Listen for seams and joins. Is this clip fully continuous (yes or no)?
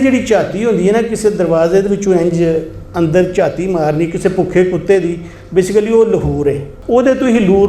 no